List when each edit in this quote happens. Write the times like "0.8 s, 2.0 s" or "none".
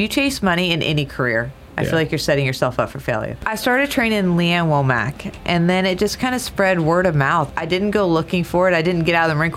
3.5 s, 7.5 s